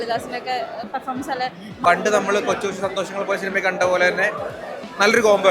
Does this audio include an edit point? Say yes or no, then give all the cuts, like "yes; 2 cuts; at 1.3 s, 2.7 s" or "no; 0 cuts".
yes; 1 cut; at 1.7 s